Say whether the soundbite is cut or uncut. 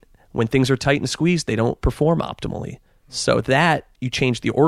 cut